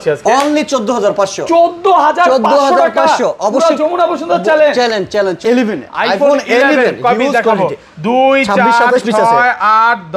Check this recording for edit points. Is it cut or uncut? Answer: cut